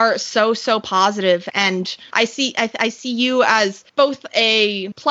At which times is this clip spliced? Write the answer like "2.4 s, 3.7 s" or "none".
1.5 s